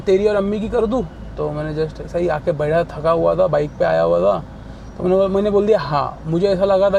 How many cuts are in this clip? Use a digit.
0